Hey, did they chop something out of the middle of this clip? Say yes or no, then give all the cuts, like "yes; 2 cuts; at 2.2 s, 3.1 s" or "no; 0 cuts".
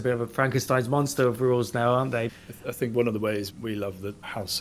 yes; 1 cut; at 2.3 s